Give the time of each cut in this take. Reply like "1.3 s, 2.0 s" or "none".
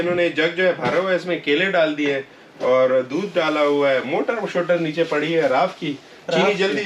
none